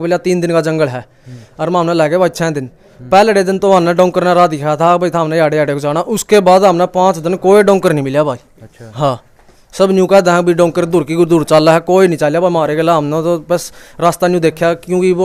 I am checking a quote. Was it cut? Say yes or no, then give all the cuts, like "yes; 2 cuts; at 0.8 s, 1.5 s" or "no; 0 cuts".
no; 0 cuts